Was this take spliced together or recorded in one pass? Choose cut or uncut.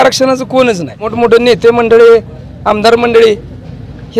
cut